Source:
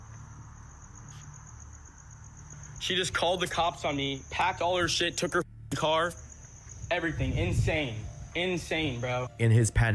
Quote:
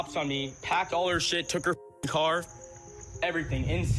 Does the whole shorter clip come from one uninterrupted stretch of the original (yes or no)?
yes